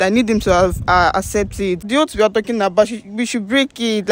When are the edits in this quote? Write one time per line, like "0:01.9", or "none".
0:01.9